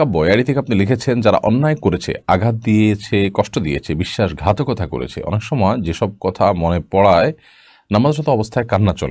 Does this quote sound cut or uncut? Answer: uncut